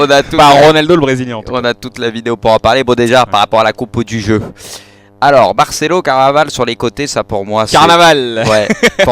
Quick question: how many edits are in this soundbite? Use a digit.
1